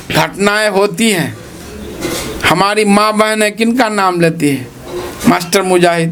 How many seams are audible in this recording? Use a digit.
0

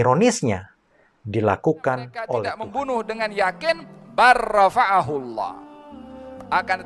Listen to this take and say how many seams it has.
1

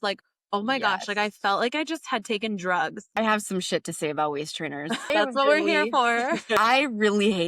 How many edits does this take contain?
3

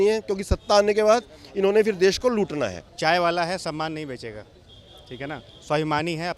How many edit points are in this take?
1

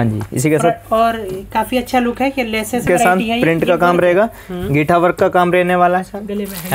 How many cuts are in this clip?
1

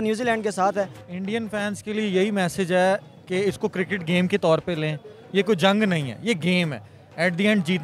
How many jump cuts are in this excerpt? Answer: 1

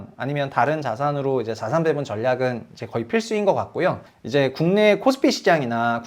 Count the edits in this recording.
1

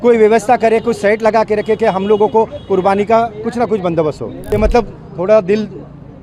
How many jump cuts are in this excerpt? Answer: 1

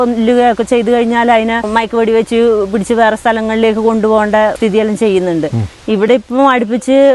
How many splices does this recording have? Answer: 3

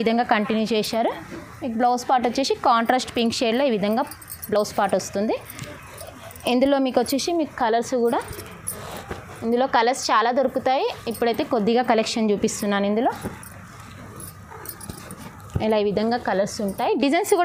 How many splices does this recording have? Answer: 0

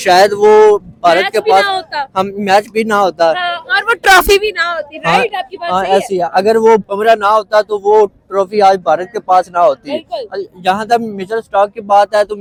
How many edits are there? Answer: 0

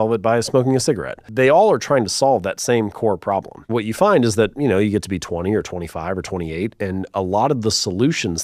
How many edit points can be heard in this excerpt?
2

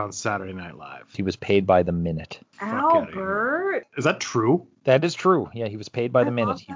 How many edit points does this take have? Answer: 2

